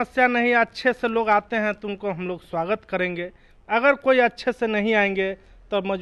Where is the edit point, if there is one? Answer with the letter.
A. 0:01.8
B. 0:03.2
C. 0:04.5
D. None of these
D